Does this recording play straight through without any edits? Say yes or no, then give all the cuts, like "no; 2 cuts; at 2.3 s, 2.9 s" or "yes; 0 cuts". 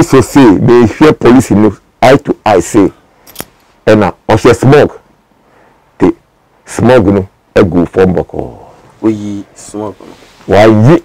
yes; 0 cuts